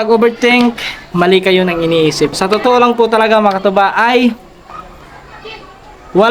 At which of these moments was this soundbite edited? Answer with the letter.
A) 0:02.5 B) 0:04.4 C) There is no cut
A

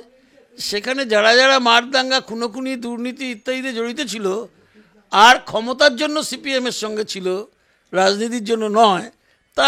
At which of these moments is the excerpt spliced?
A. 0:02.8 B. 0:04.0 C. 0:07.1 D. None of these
D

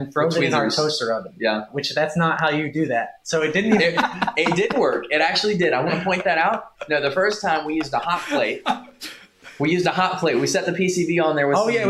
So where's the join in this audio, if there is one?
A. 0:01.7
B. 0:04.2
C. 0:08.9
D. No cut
A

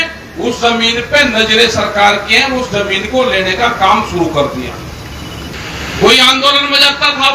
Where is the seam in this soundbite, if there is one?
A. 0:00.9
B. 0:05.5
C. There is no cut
B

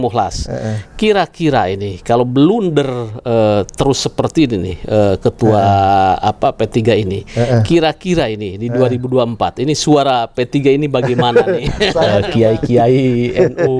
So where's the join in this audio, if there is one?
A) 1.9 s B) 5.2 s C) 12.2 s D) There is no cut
C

